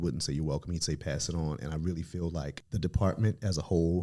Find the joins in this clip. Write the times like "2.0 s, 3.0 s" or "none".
2.6 s